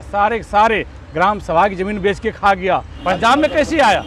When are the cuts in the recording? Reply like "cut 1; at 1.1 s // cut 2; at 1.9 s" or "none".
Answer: cut 1; at 2.9 s